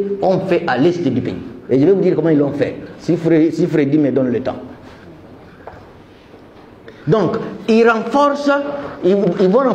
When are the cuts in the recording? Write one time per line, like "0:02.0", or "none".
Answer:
none